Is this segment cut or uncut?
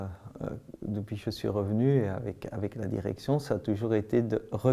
uncut